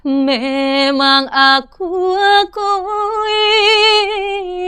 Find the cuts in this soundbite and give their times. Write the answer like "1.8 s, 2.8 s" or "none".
none